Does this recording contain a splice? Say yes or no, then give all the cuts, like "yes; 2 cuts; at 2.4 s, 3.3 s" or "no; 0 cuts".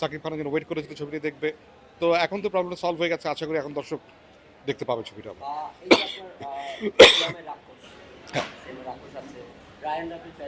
no; 0 cuts